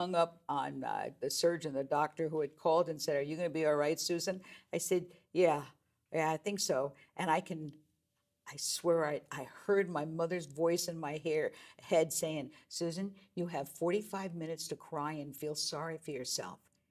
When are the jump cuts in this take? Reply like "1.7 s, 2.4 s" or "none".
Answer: none